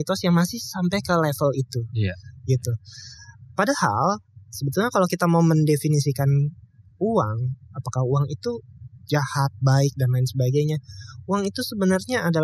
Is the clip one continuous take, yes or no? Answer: yes